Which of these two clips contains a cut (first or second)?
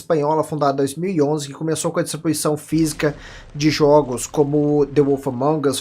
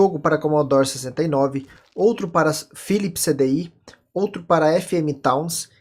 first